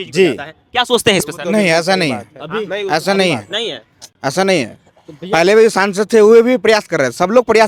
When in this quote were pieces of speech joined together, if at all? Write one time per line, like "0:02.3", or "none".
none